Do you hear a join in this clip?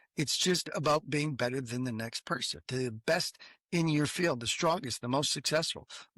yes; 1 cut; at 2.6 s

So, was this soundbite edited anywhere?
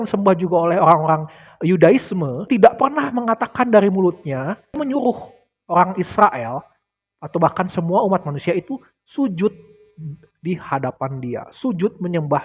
yes; 2 cuts; at 2.4 s, 4.8 s

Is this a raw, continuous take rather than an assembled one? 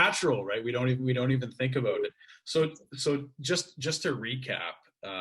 yes; 0 cuts

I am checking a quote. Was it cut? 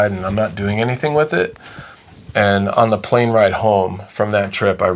no; 0 cuts

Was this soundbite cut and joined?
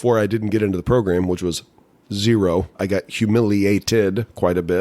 yes; 1 cut; at 2.8 s

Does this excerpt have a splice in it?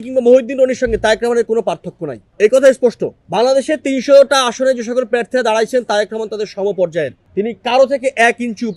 no; 0 cuts

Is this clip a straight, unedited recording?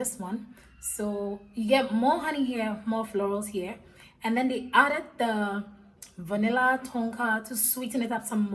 yes; 0 cuts

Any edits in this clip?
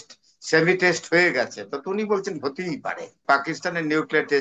yes; 1 cut; at 3.1 s

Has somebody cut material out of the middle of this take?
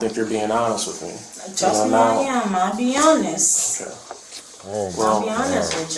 no; 0 cuts

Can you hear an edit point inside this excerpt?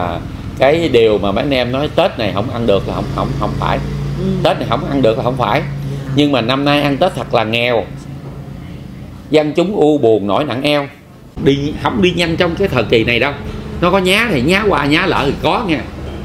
yes; 1 cut; at 11.3 s

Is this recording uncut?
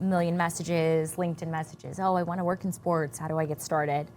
no; 1 cut; at 3.2 s

